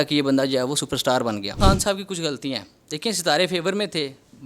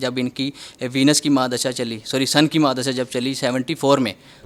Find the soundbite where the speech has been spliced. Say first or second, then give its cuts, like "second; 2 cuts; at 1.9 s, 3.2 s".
first; 1 cut; at 1.6 s